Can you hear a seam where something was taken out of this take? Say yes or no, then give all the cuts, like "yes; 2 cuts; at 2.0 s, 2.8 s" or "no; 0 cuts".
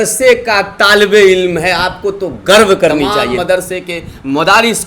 yes; 1 cut; at 3.3 s